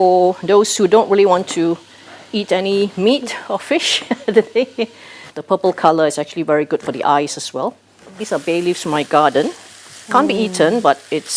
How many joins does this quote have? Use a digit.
2